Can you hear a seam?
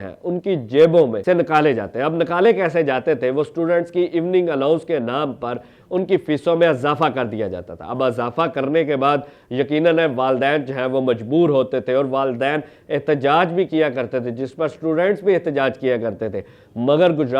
no; 0 cuts

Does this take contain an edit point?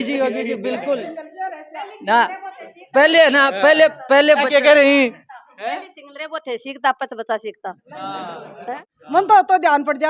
yes; 1 cut; at 9.2 s

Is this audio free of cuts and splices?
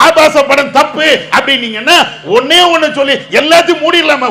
yes; 0 cuts

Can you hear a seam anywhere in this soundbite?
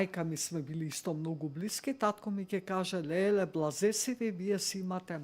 no; 0 cuts

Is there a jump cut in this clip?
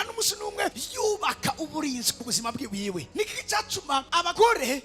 yes; 1 cut; at 3.1 s

